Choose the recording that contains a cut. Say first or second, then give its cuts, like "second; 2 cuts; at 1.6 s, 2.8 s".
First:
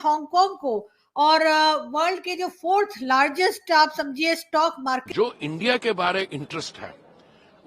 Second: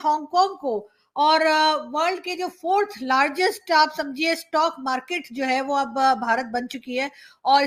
first; 1 cut; at 5.1 s